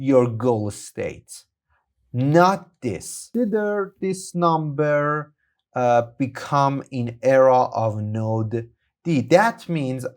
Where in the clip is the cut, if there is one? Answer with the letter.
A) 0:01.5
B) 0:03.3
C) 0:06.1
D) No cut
B